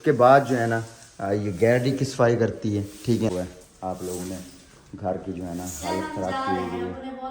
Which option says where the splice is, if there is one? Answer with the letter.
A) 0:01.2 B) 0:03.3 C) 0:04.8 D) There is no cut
B